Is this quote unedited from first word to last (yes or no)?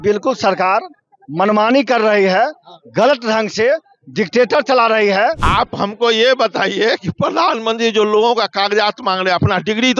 no